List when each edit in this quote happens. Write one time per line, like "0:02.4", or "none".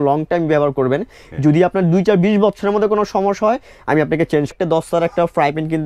0:04.5